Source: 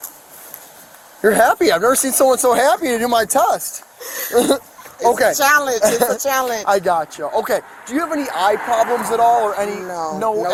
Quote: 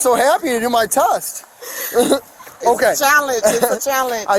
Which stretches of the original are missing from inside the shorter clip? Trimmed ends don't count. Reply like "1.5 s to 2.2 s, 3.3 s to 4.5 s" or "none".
none